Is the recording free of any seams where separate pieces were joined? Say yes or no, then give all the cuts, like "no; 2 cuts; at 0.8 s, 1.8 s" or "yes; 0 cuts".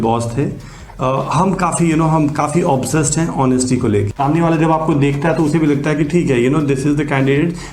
no; 1 cut; at 4.1 s